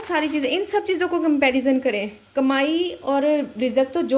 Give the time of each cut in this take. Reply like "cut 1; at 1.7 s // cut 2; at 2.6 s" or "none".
none